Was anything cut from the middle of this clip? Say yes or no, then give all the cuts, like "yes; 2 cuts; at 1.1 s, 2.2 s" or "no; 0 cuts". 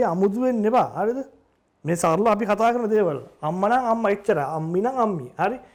no; 0 cuts